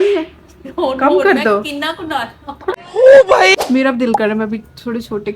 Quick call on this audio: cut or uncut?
cut